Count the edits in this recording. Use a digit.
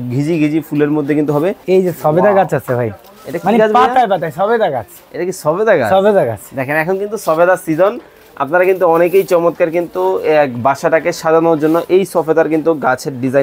1